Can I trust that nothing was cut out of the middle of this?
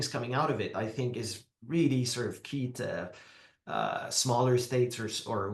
yes; 0 cuts

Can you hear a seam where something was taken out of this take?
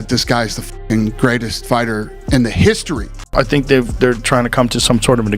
yes; 1 cut; at 3.3 s

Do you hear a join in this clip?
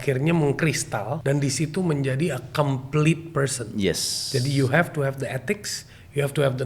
yes; 1 cut; at 1.2 s

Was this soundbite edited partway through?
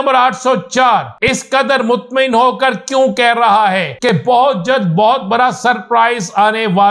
yes; 2 cuts; at 1.2 s, 4.1 s

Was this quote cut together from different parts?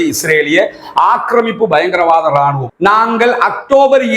yes; 1 cut; at 2.7 s

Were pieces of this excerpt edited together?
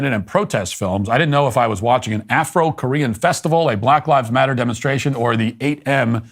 no; 0 cuts

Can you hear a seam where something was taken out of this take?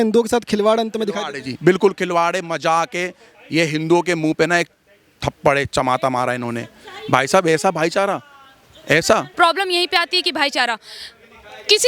yes; 1 cut; at 9.3 s

